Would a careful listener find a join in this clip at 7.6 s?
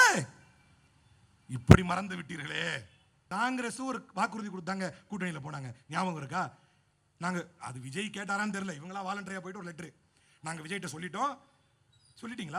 no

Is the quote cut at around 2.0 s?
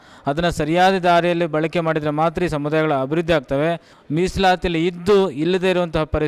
no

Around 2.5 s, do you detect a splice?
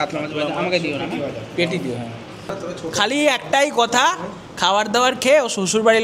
yes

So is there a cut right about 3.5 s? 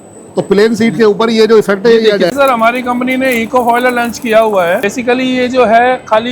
no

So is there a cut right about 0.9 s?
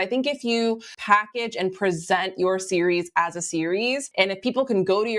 yes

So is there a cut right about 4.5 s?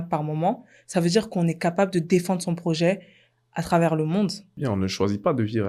yes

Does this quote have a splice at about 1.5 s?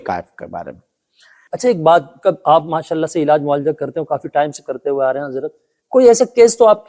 yes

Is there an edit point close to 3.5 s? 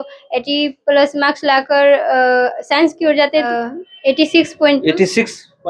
yes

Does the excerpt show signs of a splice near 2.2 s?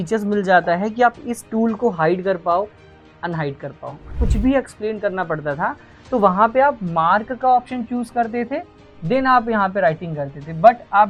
no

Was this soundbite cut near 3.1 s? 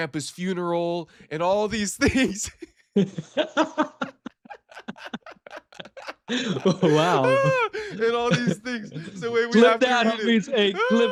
no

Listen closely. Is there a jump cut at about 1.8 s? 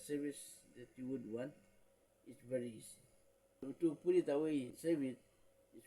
no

